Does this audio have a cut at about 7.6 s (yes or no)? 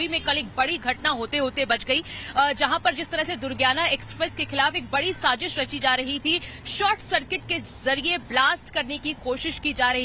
no